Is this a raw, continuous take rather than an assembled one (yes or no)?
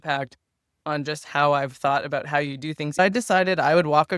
no